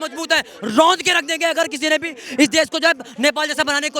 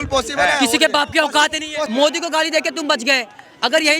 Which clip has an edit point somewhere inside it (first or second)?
second